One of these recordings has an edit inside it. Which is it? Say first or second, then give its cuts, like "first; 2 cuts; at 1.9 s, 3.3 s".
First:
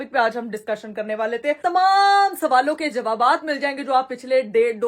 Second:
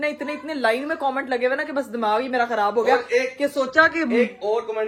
first; 1 cut; at 1.6 s